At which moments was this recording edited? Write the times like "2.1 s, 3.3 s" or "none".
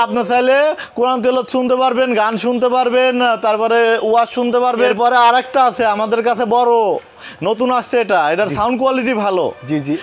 none